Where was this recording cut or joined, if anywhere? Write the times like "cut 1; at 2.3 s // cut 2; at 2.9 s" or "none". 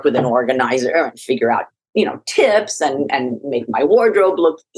cut 1; at 1.8 s